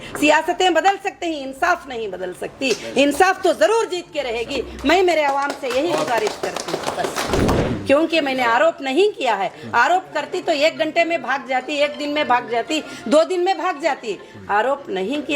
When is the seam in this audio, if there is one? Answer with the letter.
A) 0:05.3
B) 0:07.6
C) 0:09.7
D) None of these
B